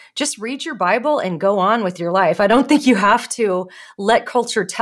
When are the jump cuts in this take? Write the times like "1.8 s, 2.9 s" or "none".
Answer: none